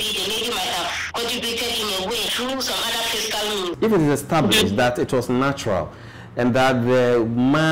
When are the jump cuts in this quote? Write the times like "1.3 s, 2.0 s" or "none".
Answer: 1.0 s, 2.3 s, 3.8 s